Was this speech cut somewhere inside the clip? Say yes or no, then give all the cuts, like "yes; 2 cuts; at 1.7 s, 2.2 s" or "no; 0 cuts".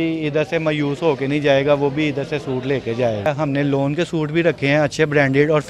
yes; 1 cut; at 3.3 s